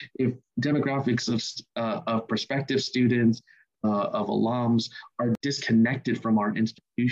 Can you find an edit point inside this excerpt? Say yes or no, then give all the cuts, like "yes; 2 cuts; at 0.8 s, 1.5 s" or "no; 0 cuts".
yes; 1 cut; at 5.4 s